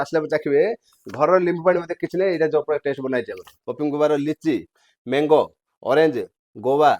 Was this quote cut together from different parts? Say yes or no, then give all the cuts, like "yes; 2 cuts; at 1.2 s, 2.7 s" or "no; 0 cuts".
yes; 1 cut; at 3.7 s